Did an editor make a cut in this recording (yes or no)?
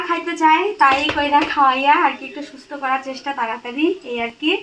no